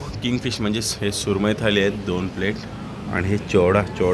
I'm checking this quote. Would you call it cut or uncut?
uncut